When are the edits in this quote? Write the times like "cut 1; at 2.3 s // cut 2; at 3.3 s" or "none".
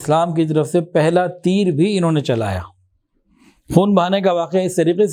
none